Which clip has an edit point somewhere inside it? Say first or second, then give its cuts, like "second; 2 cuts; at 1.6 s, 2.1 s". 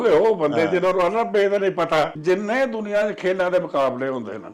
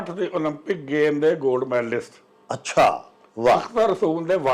first; 1 cut; at 2.1 s